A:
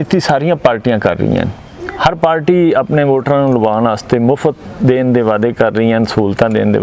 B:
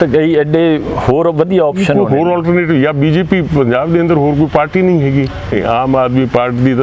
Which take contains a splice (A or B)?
B